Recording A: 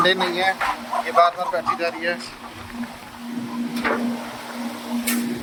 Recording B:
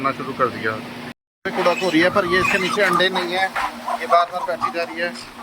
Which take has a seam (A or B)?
B